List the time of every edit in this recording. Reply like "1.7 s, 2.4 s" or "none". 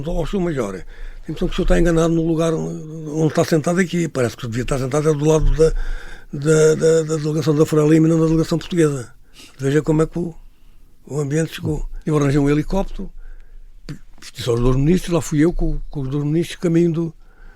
11.9 s